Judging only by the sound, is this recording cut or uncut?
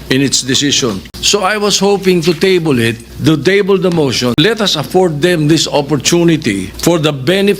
cut